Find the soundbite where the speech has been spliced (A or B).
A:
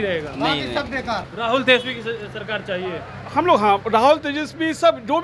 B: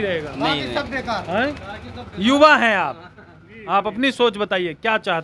A